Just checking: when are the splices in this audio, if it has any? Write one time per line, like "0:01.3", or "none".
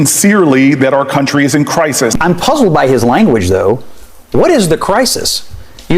0:02.1

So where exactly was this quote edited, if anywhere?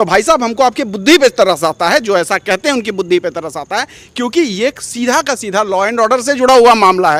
none

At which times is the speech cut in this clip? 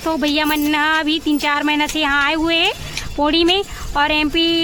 none

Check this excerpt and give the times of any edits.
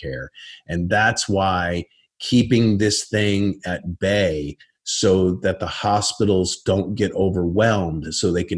none

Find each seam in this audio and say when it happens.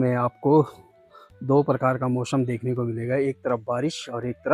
none

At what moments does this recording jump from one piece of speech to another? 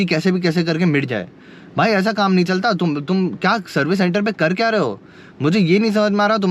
none

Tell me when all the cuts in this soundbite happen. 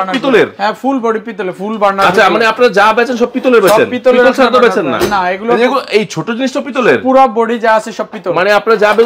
none

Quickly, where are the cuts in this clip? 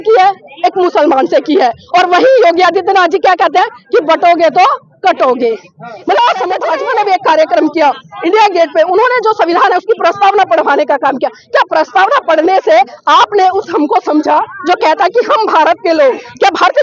0:06.6

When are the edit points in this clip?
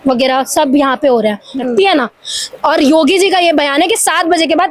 0:01.5

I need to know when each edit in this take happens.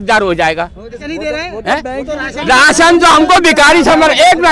0:01.0

